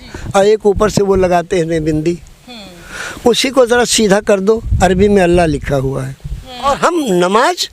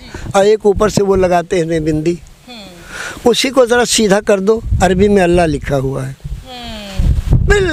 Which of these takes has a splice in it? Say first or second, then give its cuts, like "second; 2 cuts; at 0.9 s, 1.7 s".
first; 1 cut; at 6.7 s